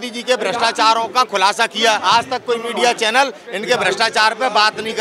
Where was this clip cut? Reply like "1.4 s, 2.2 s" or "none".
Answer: 2.0 s